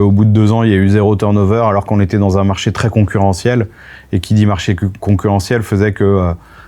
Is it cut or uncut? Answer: uncut